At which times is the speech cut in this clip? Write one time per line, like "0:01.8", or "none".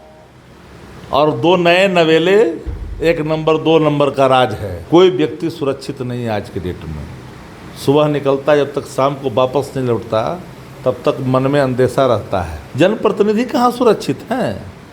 0:04.7
0:12.6